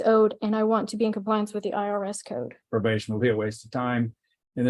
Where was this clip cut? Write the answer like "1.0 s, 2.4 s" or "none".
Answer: 2.6 s